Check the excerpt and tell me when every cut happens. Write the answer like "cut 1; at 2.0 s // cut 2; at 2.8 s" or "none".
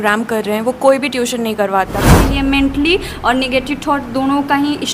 cut 1; at 2.2 s

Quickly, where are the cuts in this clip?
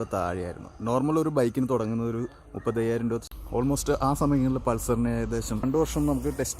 cut 1; at 3.3 s // cut 2; at 5.6 s

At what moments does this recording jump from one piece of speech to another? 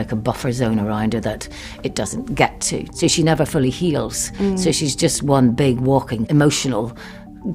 cut 1; at 2.9 s // cut 2; at 6.3 s

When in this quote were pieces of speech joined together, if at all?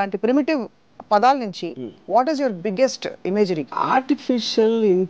cut 1; at 3.8 s

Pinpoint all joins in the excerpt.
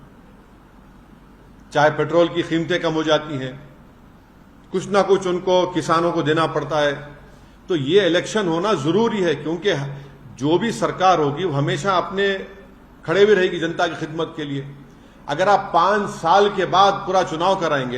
none

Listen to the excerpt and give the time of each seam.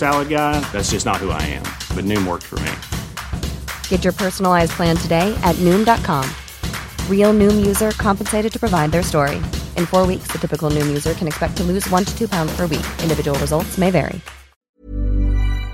cut 1; at 14.7 s

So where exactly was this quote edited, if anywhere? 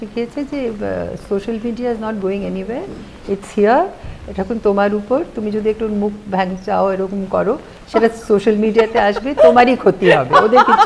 none

